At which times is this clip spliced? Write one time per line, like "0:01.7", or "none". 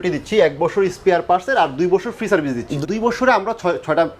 0:02.7